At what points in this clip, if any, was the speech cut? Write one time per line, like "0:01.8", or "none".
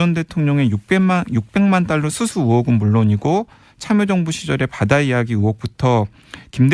0:04.1